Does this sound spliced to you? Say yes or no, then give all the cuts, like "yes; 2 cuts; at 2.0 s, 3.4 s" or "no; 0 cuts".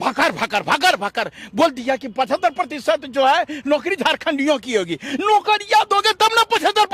no; 0 cuts